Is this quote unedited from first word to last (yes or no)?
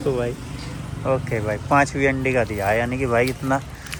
yes